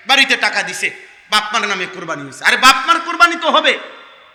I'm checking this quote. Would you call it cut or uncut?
uncut